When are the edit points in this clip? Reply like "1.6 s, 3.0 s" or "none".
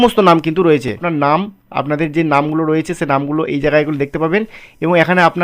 1.1 s